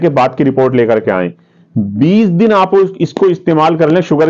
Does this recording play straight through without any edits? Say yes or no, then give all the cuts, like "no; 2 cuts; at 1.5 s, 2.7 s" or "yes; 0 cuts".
yes; 0 cuts